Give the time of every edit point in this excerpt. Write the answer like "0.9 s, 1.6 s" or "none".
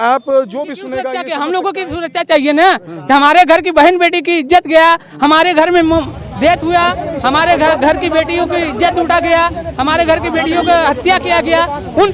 1.2 s